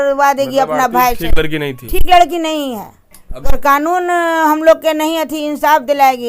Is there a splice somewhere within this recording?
yes; 1 cut; at 3.5 s

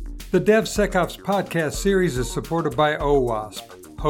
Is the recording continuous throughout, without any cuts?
yes; 0 cuts

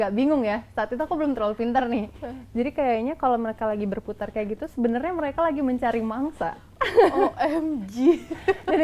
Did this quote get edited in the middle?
no; 0 cuts

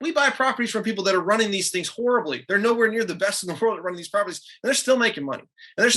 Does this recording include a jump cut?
no; 0 cuts

